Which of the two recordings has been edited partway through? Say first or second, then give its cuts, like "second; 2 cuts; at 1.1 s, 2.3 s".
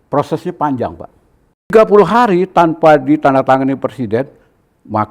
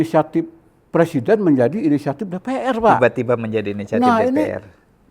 first; 1 cut; at 1.7 s